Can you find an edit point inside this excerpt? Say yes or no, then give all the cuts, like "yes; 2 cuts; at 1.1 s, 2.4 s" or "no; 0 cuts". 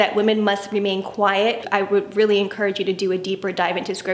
yes; 1 cut; at 1.7 s